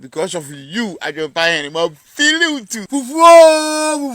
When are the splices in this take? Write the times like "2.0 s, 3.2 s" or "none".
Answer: 2.8 s